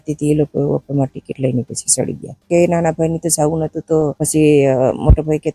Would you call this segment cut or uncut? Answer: cut